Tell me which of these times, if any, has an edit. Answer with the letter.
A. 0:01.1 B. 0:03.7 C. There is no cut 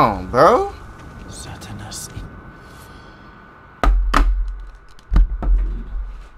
B